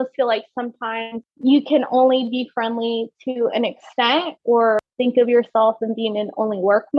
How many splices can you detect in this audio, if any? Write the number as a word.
two